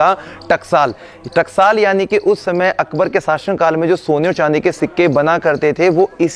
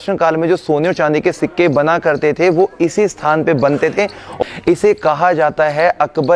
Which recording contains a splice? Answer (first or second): second